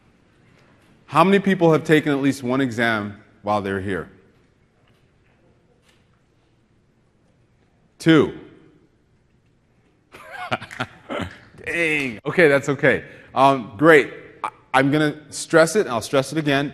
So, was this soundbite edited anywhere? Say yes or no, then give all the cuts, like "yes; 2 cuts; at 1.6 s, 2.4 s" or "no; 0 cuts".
no; 0 cuts